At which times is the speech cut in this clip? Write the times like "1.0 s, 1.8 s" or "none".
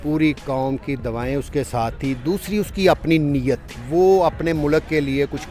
3.7 s